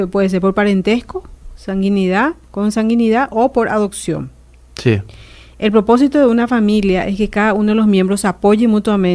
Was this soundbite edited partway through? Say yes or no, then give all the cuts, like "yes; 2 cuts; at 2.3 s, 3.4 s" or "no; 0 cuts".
no; 0 cuts